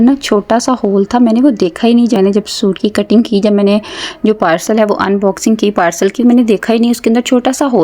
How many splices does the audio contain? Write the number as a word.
one